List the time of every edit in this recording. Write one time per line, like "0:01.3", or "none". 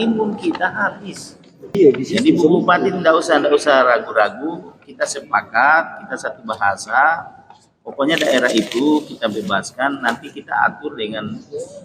0:01.8